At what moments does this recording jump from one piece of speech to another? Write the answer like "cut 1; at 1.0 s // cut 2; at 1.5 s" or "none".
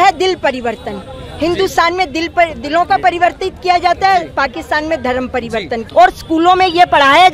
cut 1; at 5.8 s